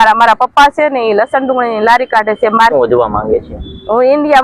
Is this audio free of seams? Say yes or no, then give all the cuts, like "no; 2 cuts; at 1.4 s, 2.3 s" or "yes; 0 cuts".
no; 1 cut; at 2.7 s